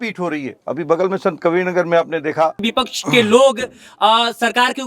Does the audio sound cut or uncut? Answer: cut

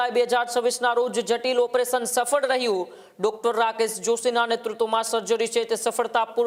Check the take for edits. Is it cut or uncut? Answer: uncut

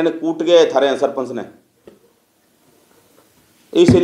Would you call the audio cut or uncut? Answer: uncut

